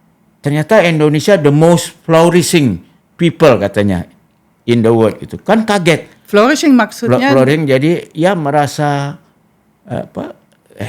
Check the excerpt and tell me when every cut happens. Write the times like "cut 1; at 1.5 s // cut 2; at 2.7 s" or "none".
none

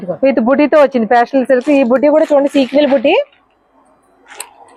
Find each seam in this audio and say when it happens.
none

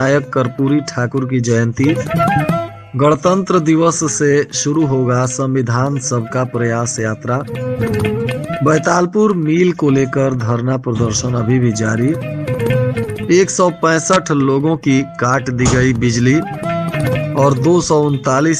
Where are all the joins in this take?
none

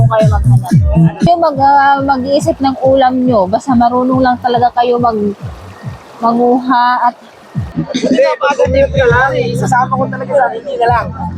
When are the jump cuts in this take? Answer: cut 1; at 1.3 s // cut 2; at 7.7 s

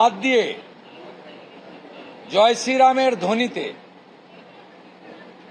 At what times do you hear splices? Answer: none

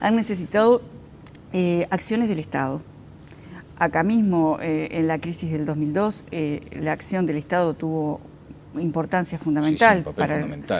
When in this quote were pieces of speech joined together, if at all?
cut 1; at 6.1 s

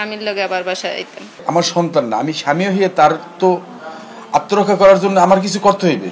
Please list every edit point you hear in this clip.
cut 1; at 1.3 s

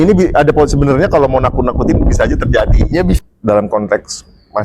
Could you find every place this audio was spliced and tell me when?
cut 1; at 3.2 s

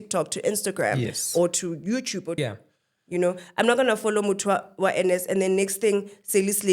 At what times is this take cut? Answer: cut 1; at 2.5 s

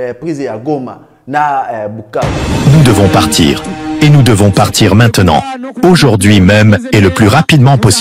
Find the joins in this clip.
cut 1; at 2.6 s

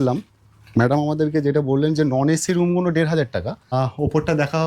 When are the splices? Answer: cut 1; at 3.7 s

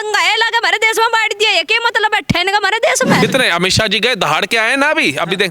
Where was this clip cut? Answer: cut 1; at 3.2 s

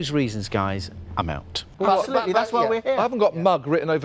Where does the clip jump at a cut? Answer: cut 1; at 1.7 s

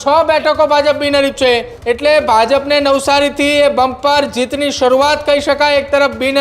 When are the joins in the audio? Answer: cut 1; at 1.7 s

